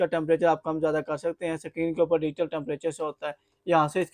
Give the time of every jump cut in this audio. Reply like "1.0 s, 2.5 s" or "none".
none